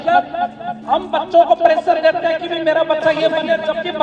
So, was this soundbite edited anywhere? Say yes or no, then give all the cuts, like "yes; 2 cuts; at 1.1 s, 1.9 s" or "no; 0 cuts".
no; 0 cuts